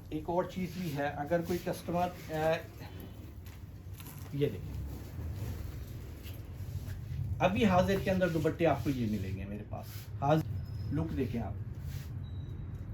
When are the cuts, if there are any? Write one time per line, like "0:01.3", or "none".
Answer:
0:10.4